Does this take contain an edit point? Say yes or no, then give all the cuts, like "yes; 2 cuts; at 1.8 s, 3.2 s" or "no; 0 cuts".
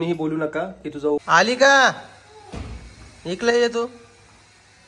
yes; 1 cut; at 1.2 s